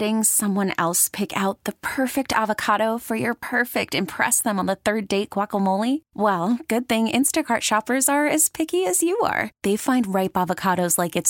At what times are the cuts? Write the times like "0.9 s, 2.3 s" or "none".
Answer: none